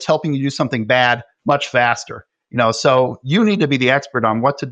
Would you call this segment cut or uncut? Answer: cut